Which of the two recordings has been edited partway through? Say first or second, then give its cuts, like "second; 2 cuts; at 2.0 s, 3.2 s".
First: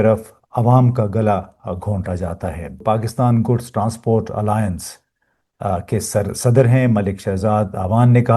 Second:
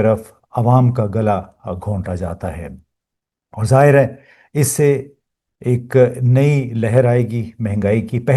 first; 1 cut; at 2.8 s